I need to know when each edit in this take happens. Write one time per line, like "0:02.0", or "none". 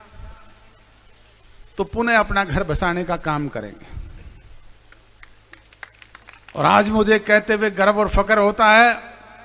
none